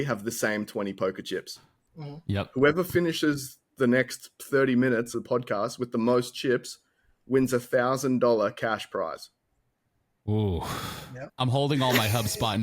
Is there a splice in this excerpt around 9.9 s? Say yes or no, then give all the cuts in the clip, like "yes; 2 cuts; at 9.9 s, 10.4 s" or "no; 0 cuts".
no; 2 cuts; at 5.1 s, 11.3 s